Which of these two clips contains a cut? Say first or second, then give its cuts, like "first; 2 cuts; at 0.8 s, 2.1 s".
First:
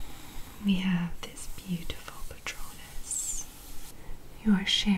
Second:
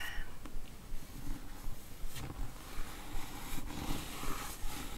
first; 1 cut; at 3.9 s